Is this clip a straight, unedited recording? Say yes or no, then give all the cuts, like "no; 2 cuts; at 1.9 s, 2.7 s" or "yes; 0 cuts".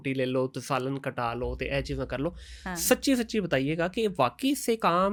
yes; 0 cuts